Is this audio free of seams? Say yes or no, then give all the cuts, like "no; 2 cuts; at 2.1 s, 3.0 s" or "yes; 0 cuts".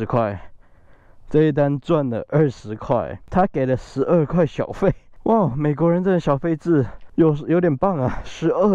no; 3 cuts; at 3.2 s, 5.1 s, 7.0 s